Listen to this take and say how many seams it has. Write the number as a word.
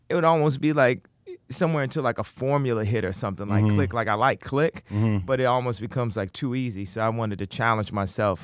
one